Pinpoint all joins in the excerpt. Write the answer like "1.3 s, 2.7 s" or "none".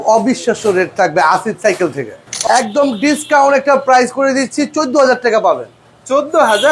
2.3 s